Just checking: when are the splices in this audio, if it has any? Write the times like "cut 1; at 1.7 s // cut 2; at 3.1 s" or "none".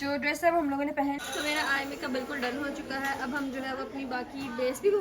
cut 1; at 1.2 s